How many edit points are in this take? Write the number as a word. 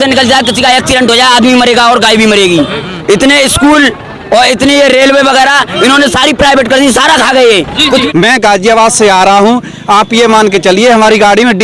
two